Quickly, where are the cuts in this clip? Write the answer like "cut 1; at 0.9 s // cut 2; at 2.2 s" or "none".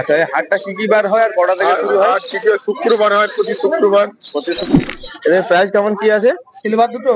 cut 1; at 4.6 s